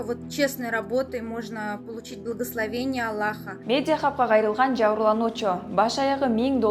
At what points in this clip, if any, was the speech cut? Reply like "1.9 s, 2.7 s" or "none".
3.5 s